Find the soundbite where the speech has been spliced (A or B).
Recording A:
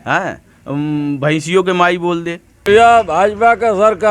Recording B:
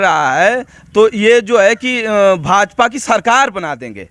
A